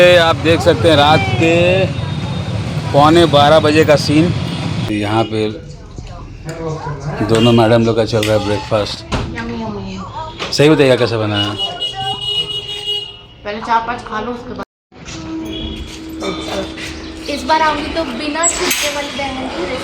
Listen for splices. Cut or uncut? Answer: cut